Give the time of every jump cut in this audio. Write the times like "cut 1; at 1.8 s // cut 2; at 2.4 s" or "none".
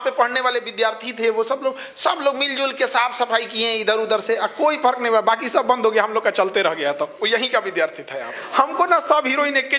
cut 1; at 8.4 s